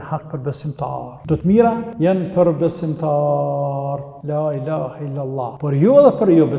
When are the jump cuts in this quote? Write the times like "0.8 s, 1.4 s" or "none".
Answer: 1.1 s, 1.9 s, 4.1 s, 5.6 s